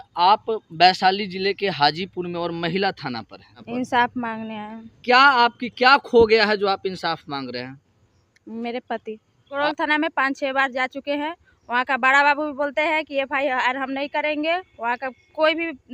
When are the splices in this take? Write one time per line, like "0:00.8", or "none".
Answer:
0:03.5
0:09.6